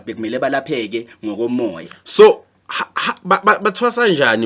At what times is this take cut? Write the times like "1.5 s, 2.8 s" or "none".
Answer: none